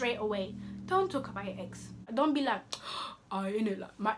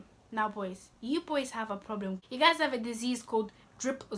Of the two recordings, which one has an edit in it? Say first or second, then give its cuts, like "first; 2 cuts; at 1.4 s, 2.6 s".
first; 1 cut; at 2.0 s